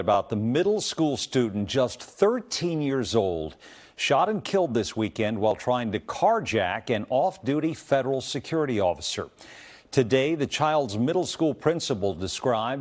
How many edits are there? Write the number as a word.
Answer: zero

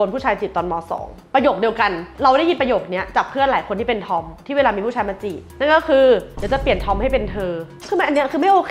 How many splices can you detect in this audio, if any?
zero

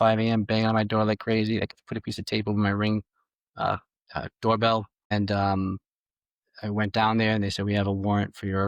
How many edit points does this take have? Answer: one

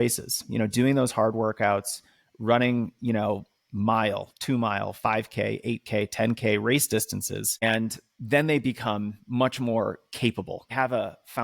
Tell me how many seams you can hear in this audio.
two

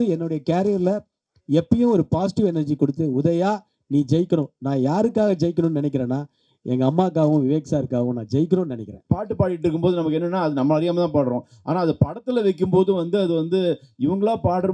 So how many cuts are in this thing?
one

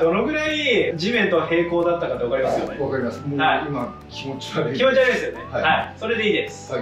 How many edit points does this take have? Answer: zero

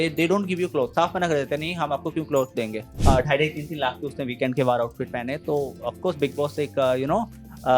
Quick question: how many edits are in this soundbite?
one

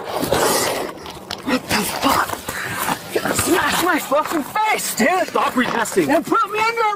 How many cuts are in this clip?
zero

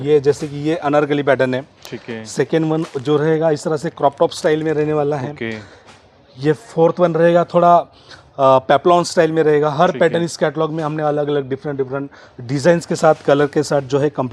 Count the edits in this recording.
zero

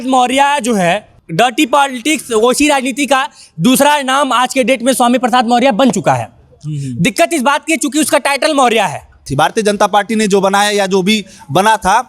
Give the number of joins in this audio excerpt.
two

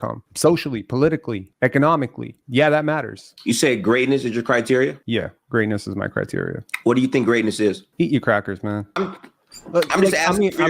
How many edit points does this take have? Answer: one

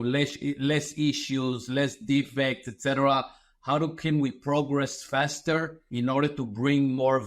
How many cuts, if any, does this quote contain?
one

